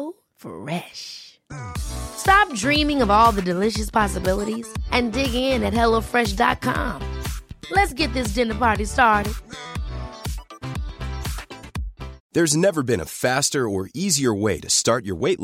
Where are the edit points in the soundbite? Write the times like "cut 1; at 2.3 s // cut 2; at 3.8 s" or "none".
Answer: cut 1; at 12.1 s